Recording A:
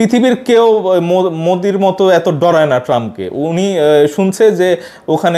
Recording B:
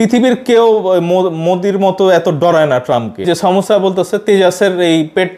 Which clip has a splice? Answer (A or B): B